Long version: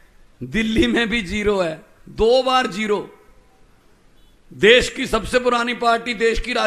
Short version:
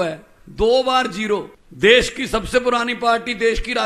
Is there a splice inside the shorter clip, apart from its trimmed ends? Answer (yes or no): yes